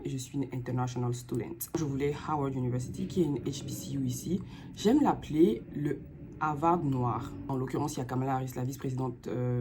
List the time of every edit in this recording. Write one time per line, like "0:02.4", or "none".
0:01.7
0:07.5